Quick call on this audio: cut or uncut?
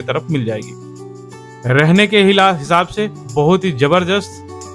uncut